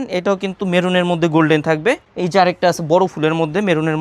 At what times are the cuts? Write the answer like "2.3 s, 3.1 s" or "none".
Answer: none